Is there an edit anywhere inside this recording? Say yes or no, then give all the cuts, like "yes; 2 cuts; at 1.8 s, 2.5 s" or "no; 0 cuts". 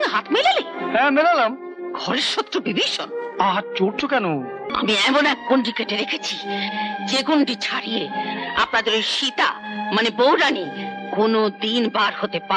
yes; 1 cut; at 4.7 s